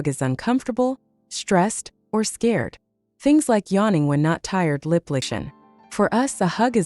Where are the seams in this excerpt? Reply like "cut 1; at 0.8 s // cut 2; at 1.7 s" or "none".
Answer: cut 1; at 5.3 s